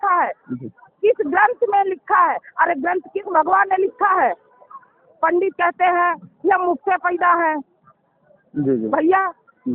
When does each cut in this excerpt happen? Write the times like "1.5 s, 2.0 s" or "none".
none